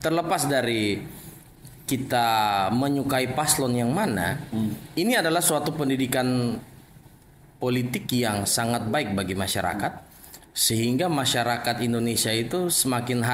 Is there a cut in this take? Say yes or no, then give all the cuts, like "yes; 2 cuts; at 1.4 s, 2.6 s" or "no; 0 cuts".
no; 0 cuts